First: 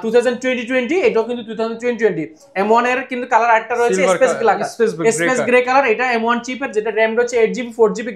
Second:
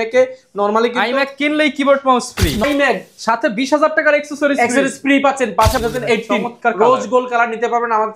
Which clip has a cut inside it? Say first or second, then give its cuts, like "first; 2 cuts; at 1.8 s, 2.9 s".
second; 2 cuts; at 2.6 s, 5.7 s